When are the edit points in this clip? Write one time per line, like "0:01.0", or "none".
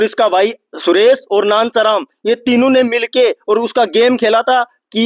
none